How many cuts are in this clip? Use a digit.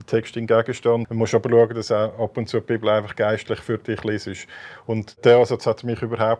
2